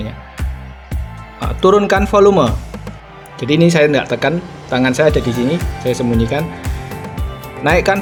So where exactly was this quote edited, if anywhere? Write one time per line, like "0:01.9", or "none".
none